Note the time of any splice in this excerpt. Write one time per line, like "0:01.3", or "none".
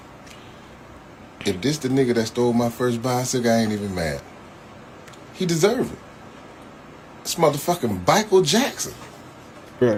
none